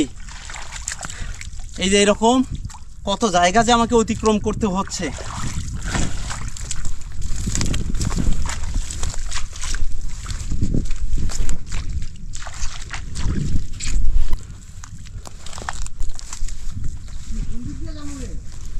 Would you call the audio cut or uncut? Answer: uncut